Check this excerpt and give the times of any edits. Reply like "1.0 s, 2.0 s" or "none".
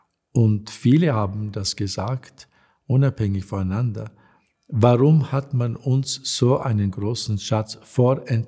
none